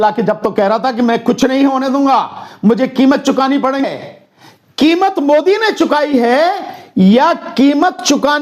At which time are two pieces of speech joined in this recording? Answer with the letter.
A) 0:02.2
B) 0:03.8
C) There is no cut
B